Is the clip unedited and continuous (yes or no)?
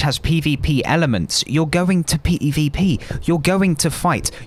yes